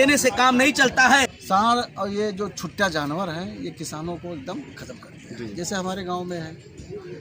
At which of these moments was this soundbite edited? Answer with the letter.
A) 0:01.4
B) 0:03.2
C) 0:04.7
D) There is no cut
A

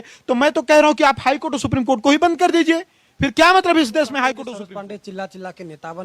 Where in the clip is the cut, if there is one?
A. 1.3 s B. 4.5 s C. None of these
B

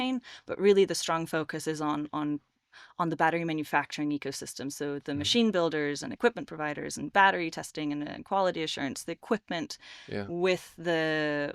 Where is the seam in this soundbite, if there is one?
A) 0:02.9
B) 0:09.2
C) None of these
C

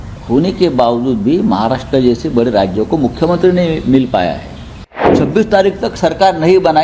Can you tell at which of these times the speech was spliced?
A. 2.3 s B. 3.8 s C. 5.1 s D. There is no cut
C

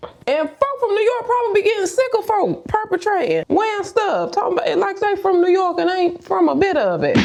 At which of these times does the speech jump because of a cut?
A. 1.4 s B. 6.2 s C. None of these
C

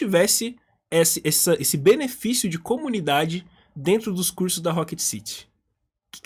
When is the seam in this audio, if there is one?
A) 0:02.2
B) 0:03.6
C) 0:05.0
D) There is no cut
D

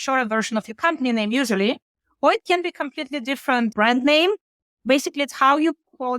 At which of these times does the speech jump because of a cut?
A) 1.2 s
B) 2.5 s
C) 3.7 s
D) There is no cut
C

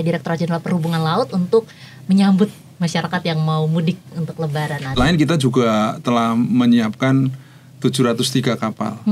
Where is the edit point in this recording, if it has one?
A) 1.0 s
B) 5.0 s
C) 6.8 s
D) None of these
B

